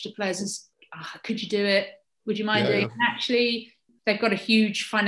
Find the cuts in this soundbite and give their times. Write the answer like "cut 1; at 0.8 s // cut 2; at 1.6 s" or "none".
none